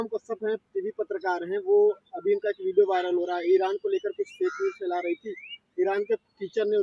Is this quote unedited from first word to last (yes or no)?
yes